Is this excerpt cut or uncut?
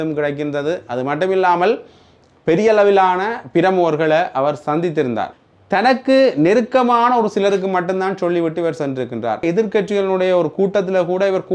cut